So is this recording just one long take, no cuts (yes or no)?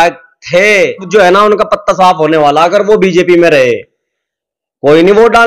no